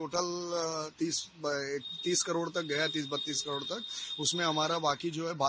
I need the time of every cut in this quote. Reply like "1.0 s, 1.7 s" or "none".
none